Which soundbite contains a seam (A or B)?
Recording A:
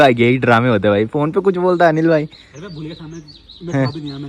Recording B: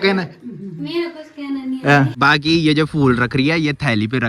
B